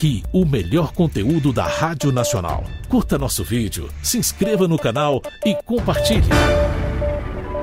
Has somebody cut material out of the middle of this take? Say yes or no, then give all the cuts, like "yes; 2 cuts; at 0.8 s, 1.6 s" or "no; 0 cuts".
yes; 2 cuts; at 2.7 s, 5.9 s